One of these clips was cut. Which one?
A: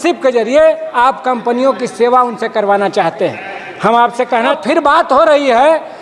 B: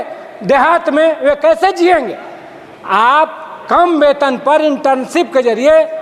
A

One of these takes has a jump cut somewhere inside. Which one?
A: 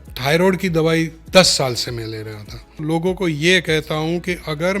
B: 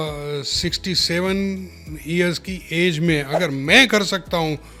A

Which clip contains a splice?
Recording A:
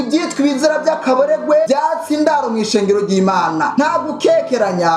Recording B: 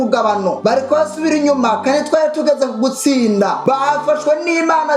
A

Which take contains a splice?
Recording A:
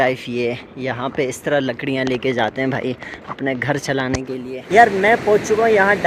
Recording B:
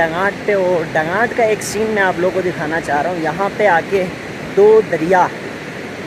A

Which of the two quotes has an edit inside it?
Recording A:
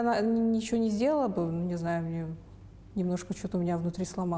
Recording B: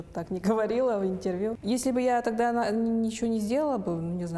B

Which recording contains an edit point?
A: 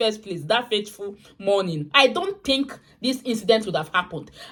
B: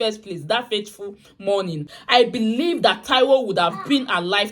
B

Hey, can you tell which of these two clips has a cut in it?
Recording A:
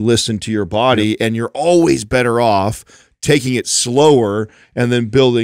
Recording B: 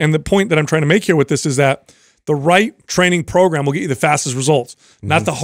B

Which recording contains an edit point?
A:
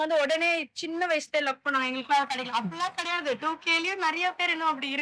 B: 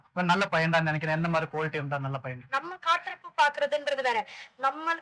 B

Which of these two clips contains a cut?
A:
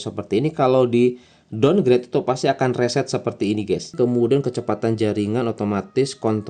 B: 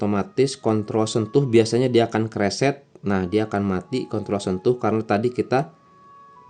A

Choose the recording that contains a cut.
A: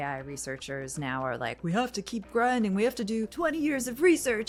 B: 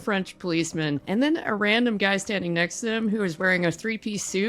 B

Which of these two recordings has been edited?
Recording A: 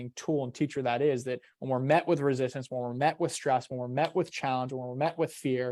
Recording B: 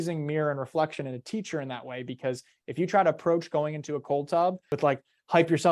B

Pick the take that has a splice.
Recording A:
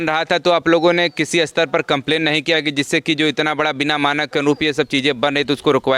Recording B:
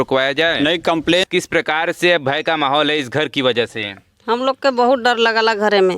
B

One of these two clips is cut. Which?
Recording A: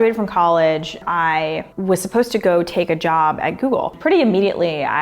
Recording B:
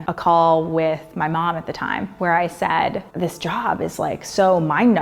A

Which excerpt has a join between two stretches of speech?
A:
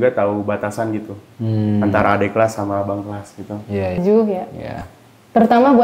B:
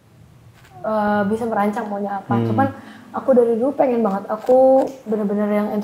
A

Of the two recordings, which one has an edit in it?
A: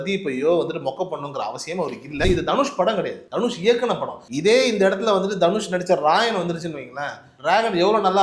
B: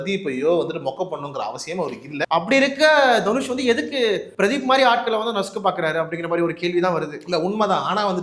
A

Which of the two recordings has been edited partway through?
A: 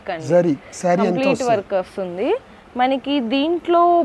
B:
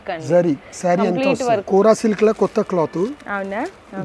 B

